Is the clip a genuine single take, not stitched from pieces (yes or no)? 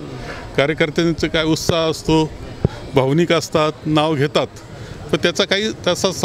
yes